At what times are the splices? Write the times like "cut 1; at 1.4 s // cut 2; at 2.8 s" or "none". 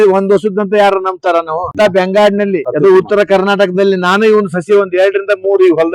cut 1; at 1.7 s // cut 2; at 2.7 s